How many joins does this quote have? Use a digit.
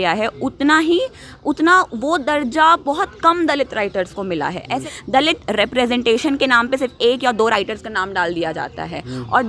1